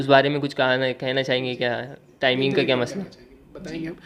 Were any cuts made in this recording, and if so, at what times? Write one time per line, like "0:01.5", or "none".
none